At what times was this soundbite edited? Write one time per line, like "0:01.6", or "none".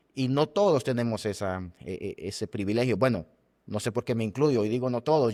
none